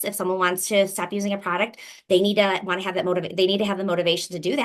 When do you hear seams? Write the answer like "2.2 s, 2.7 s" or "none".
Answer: none